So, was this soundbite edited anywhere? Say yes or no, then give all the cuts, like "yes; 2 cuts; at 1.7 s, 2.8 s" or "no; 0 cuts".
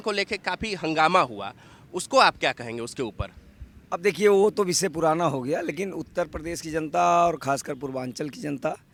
no; 0 cuts